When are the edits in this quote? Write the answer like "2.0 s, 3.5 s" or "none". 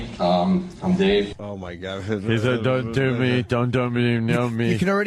1.4 s